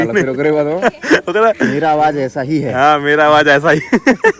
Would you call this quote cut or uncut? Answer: uncut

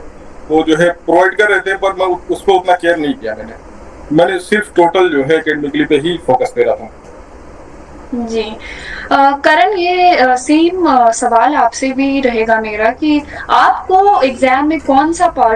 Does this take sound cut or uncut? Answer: uncut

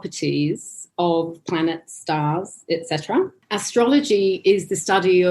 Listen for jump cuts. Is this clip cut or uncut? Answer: cut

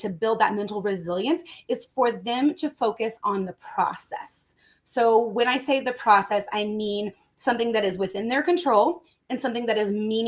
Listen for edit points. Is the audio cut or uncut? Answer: uncut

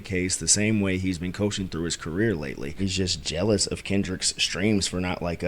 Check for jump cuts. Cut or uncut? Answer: cut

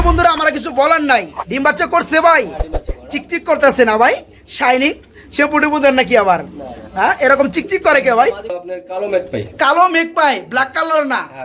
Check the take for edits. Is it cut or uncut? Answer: cut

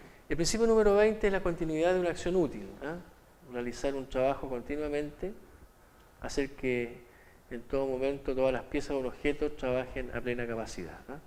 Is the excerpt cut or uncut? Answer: uncut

